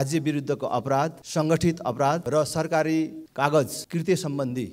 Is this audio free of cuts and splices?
no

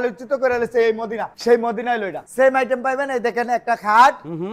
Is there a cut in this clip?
yes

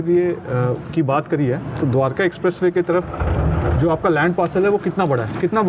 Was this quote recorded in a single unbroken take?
yes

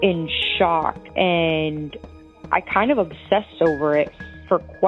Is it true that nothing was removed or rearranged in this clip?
yes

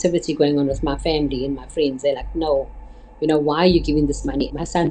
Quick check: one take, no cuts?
yes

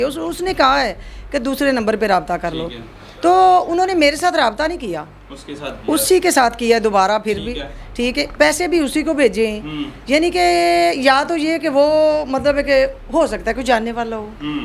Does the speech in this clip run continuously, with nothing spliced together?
yes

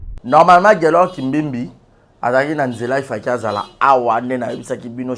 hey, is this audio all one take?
yes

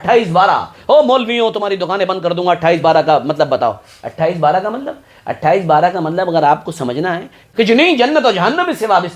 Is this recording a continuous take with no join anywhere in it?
no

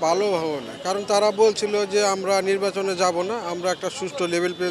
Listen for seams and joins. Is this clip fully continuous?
yes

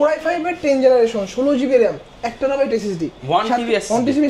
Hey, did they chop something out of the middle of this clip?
no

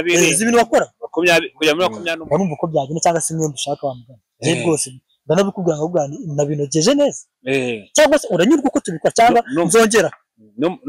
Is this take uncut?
no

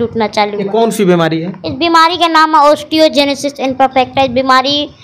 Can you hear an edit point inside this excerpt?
no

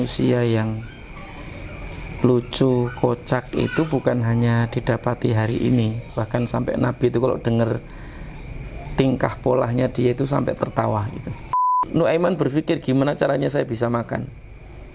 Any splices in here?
yes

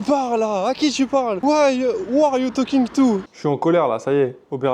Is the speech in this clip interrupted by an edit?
yes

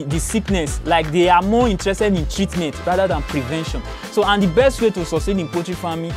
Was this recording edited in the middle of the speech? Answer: no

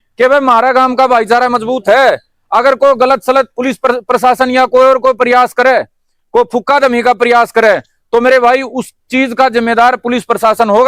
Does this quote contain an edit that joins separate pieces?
no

